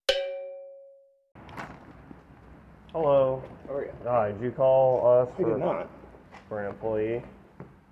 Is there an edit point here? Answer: yes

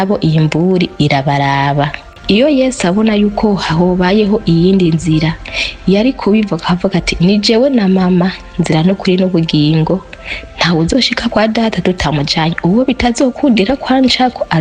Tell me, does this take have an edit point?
yes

